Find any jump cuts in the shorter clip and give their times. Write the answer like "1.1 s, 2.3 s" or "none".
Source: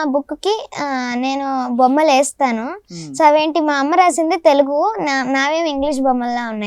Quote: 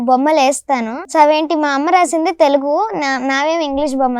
1.0 s